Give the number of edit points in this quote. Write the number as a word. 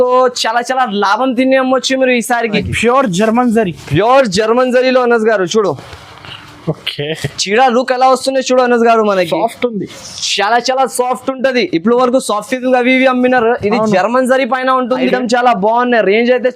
two